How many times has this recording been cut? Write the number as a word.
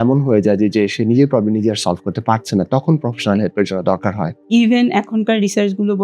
one